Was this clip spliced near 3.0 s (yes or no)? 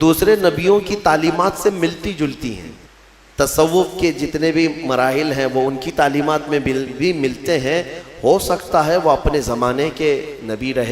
yes